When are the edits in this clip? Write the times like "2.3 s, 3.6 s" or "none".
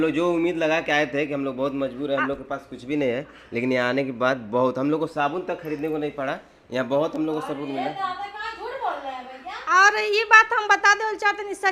none